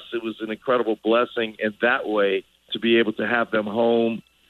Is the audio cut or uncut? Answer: cut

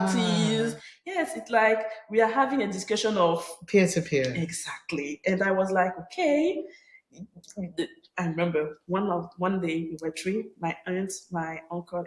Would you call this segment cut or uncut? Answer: uncut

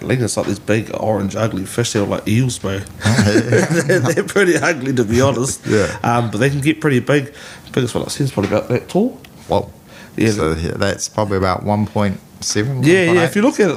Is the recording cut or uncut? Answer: uncut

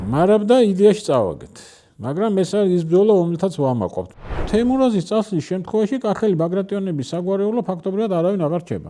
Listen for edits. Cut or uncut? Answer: cut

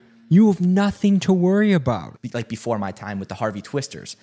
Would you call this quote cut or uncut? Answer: cut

